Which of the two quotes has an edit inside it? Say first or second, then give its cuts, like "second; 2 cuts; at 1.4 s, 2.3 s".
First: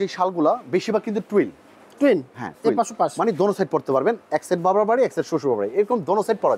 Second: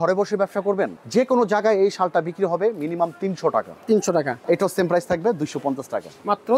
second; 2 cuts; at 1.0 s, 4.4 s